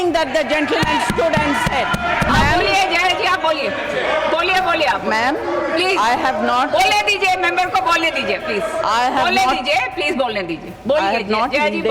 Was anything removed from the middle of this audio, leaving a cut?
yes; 1 cut; at 2.3 s

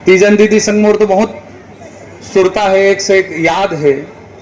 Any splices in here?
no; 0 cuts

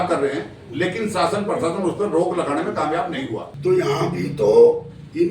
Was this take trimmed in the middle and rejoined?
yes; 1 cut; at 3.5 s

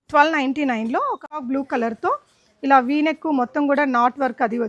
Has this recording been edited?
yes; 1 cut; at 1.2 s

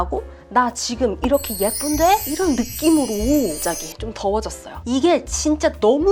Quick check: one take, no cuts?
no; 1 cut; at 4.7 s

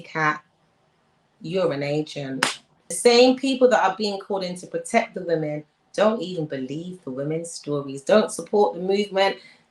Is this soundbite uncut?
no; 1 cut; at 3.0 s

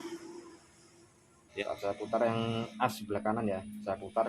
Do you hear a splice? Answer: yes; 1 cut; at 1.6 s

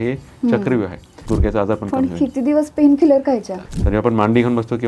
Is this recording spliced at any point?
yes; 2 cuts; at 1.2 s, 3.6 s

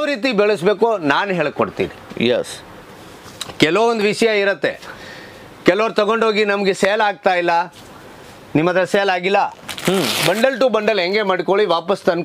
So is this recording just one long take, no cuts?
yes; 0 cuts

